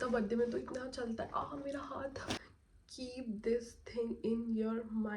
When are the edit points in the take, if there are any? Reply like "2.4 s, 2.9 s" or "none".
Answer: 2.4 s